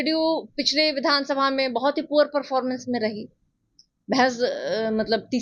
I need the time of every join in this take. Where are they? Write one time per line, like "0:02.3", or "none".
none

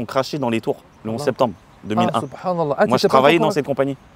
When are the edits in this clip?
0:00.9

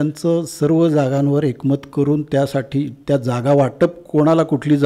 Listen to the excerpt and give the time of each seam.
none

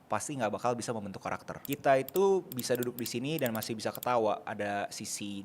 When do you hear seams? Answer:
0:01.5

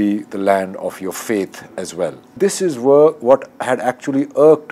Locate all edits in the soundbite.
0:02.3

